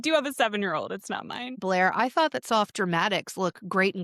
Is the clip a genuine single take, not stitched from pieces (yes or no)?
no